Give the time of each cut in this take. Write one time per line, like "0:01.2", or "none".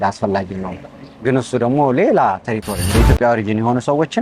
0:02.8